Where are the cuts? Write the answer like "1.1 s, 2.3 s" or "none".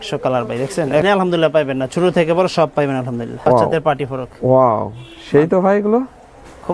1.0 s, 3.3 s